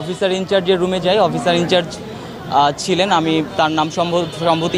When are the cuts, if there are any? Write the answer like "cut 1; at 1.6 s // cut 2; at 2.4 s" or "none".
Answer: none